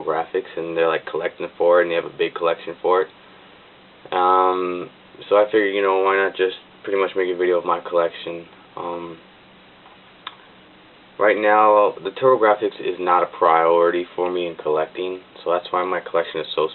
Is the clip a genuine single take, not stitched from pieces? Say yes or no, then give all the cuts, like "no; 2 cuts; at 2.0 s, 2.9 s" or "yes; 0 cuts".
no; 1 cut; at 10.3 s